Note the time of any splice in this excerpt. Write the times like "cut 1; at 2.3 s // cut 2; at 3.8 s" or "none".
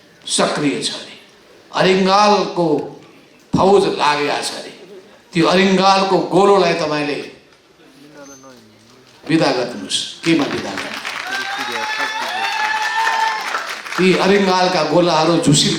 none